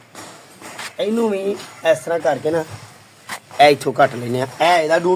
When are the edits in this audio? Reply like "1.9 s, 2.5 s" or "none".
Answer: none